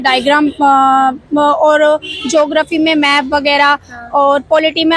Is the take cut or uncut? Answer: uncut